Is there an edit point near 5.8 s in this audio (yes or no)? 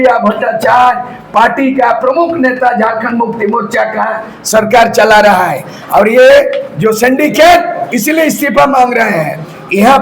no